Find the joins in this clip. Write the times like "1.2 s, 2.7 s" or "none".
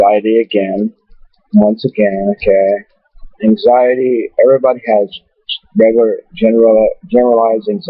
none